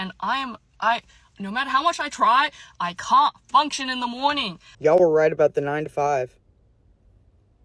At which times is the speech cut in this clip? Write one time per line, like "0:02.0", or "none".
0:04.7